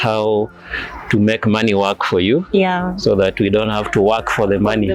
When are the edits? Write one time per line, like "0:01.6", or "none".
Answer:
none